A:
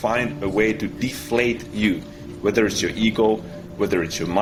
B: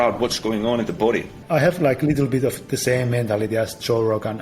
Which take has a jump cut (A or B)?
B